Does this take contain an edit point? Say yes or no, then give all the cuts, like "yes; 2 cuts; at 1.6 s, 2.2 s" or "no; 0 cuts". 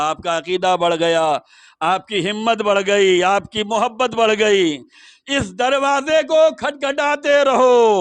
no; 0 cuts